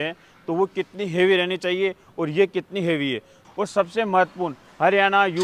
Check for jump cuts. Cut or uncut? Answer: cut